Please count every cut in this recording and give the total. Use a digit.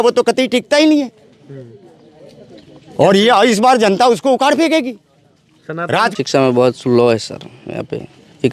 1